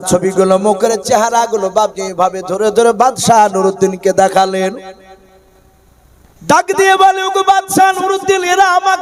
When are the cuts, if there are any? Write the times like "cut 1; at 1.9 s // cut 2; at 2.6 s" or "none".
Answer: none